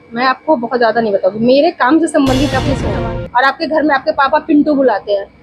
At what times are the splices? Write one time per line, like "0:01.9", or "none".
0:02.8